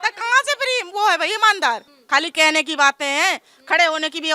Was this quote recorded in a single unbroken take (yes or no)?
no